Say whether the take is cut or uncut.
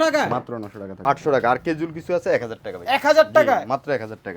cut